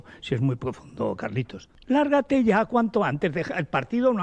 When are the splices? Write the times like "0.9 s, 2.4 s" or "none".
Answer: none